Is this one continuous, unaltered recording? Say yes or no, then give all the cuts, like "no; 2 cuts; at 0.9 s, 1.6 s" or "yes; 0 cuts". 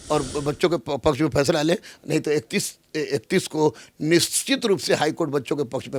yes; 0 cuts